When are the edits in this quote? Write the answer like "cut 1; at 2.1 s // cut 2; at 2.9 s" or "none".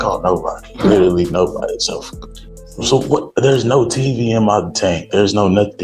none